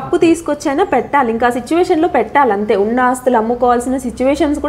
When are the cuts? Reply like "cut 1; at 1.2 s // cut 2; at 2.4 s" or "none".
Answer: none